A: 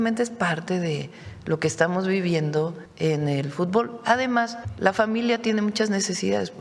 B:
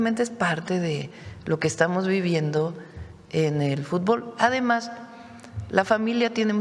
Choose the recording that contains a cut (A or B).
A